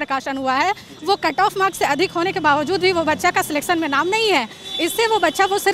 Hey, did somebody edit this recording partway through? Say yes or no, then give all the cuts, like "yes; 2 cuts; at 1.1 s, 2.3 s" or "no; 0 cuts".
no; 0 cuts